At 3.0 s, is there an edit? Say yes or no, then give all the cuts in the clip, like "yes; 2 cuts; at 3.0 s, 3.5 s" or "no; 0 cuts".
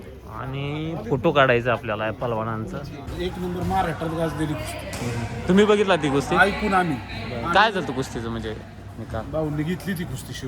yes; 1 cut; at 3.0 s